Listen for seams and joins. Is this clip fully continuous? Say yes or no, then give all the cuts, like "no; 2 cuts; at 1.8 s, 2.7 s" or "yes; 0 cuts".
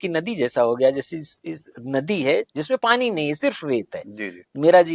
yes; 0 cuts